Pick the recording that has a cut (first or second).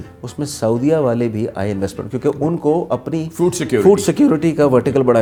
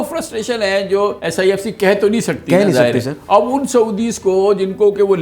second